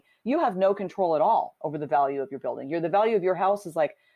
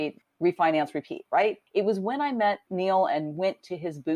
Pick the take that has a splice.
second; 2 cuts; at 1.6 s, 2.7 s

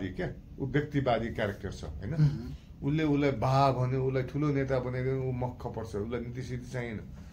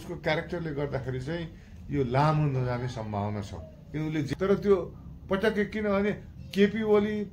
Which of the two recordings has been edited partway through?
second; 1 cut; at 4.3 s

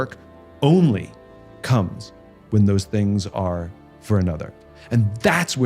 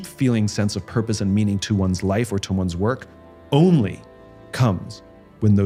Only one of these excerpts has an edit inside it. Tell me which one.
first; 1 cut; at 4.5 s

